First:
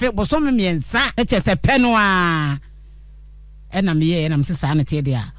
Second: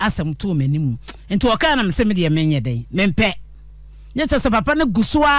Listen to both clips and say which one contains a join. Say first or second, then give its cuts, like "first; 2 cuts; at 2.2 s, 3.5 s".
first; 1 cut; at 1.1 s